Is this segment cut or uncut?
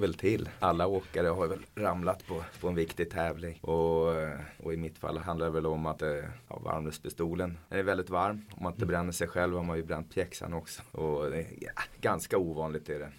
uncut